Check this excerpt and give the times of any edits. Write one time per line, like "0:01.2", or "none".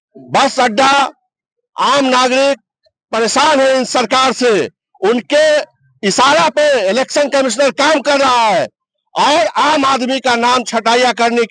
none